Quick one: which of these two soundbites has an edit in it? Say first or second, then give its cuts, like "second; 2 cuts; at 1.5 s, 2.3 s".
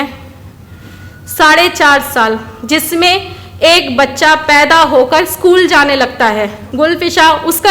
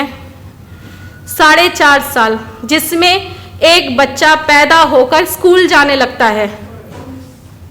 first; 1 cut; at 6.6 s